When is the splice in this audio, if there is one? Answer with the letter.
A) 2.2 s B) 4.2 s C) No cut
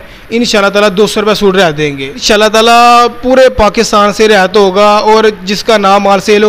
A